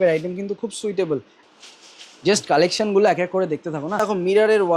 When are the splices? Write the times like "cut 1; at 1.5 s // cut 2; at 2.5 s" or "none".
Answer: cut 1; at 1.3 s // cut 2; at 4.0 s